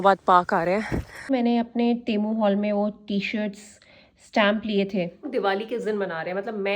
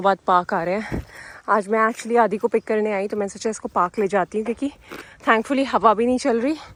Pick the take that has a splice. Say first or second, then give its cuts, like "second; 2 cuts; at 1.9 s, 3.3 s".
first; 2 cuts; at 1.3 s, 5.3 s